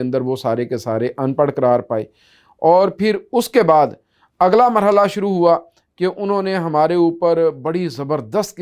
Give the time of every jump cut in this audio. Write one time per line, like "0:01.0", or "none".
none